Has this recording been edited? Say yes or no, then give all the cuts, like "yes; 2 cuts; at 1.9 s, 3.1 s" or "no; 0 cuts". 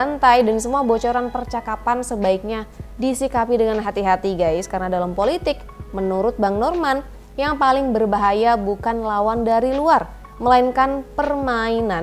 no; 0 cuts